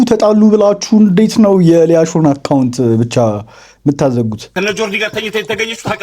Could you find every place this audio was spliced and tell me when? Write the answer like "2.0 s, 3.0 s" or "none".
4.4 s